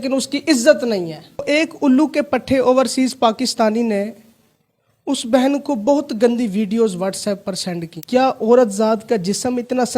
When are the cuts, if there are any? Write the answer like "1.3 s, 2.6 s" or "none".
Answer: 1.4 s, 7.9 s